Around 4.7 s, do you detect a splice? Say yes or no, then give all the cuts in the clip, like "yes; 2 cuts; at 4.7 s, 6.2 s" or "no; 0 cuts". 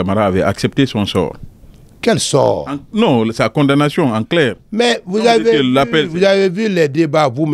no; 0 cuts